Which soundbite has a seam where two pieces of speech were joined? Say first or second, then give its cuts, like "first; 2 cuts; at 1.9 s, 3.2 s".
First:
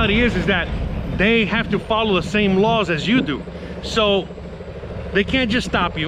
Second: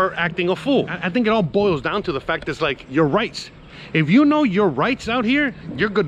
second; 1 cut; at 1.0 s